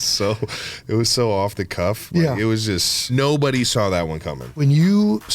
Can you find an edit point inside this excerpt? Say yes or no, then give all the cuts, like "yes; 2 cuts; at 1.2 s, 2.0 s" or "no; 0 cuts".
yes; 1 cut; at 3.1 s